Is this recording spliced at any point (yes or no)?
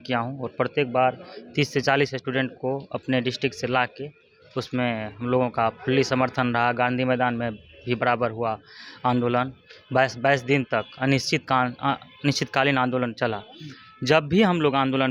no